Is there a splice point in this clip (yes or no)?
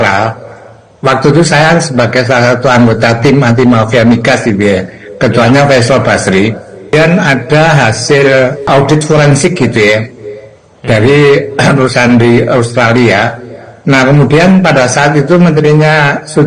yes